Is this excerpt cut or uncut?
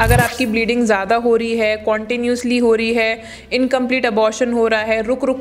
uncut